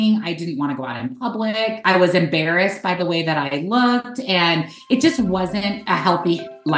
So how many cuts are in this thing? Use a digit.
2